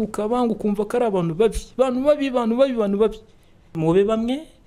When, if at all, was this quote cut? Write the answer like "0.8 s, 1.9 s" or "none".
3.8 s